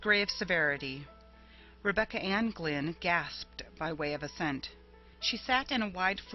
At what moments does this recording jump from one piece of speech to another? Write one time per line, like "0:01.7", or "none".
0:04.2